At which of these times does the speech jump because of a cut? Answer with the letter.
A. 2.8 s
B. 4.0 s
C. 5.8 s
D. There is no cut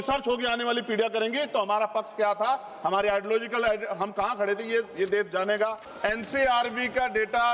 C